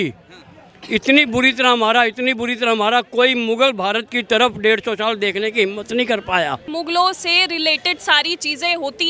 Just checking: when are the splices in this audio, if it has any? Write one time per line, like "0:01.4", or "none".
0:06.7